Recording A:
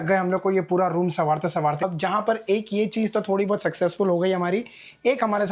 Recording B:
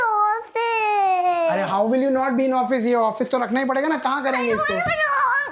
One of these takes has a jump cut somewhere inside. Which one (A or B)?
A